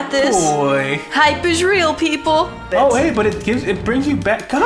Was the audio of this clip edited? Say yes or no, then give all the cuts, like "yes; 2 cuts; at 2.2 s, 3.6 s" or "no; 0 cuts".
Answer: yes; 1 cut; at 2.7 s